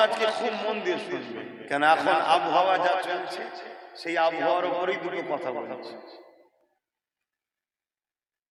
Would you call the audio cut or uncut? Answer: uncut